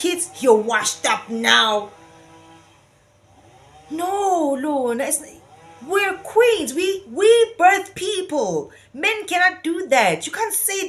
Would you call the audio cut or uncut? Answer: uncut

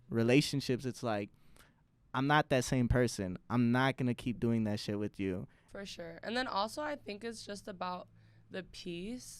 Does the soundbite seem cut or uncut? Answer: cut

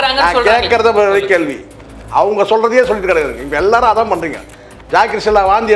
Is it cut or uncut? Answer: uncut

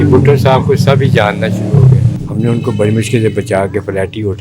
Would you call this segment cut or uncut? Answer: cut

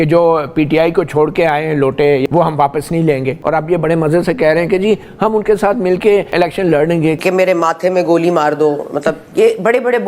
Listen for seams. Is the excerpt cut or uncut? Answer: cut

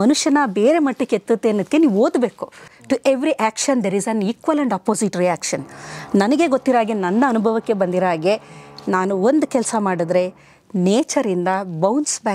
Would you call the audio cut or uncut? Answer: cut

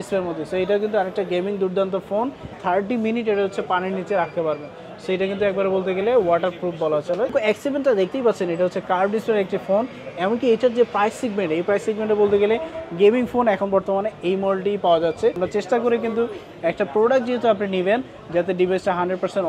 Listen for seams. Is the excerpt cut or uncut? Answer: cut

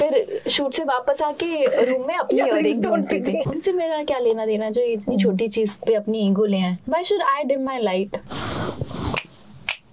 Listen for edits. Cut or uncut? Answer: cut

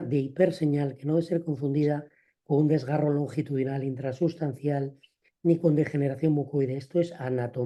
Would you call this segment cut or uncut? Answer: uncut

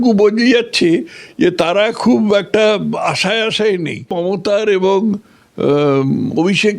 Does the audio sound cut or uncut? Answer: cut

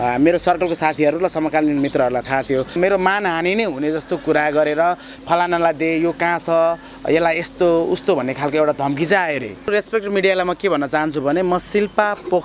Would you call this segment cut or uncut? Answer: cut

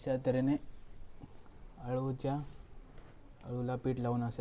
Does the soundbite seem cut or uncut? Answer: uncut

